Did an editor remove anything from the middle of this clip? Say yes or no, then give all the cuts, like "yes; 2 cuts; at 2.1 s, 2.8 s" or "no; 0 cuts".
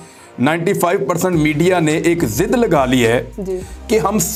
no; 0 cuts